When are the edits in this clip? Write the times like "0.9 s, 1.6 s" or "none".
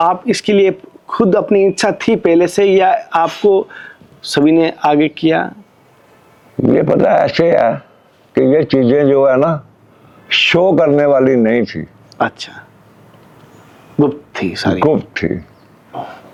none